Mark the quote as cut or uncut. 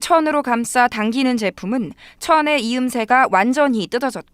cut